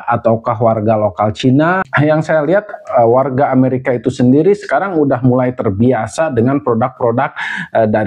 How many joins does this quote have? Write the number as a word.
one